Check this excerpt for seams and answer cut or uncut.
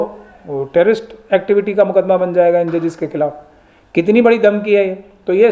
uncut